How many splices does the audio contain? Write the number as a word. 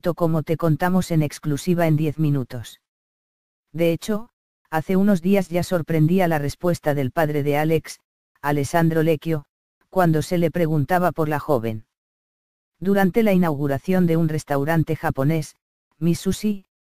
one